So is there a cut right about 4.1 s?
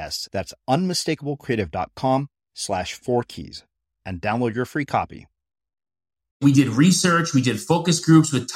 no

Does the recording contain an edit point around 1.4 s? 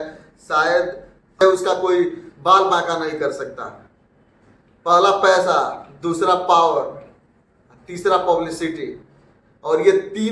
yes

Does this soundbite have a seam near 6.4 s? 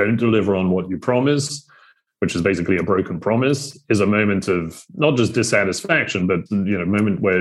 yes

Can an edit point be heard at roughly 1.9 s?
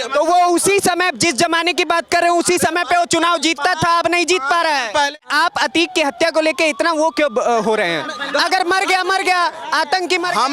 no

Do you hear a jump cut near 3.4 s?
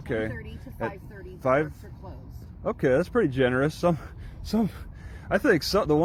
no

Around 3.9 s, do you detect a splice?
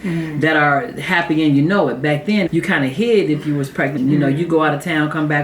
yes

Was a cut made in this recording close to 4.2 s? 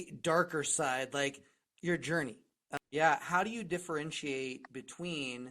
no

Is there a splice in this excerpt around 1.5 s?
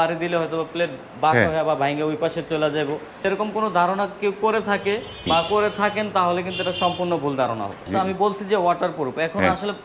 no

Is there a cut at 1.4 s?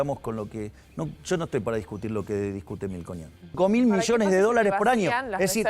no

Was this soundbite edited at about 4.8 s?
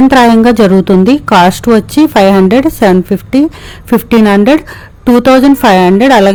no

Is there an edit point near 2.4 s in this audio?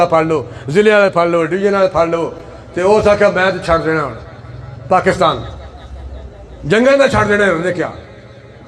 no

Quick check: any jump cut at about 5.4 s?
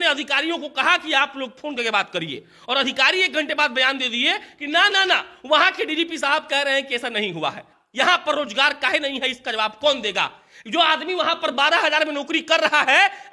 no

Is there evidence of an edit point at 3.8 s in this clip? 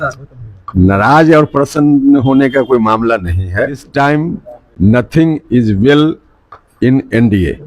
yes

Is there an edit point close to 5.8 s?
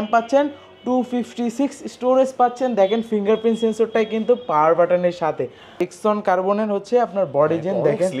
yes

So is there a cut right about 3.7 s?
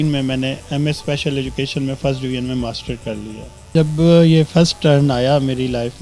yes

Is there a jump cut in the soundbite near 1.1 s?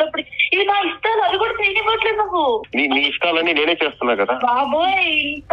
no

